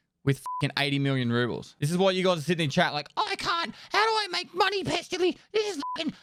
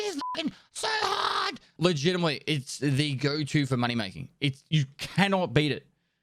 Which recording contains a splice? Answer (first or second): second